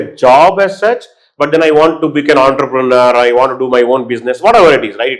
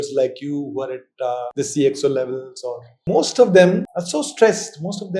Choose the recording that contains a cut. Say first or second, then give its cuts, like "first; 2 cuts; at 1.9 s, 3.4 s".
second; 3 cuts; at 1.5 s, 3.0 s, 4.0 s